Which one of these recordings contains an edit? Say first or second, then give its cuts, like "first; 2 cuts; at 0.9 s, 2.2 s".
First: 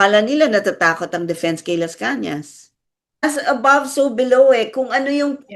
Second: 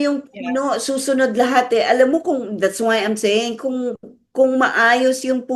first; 1 cut; at 3.2 s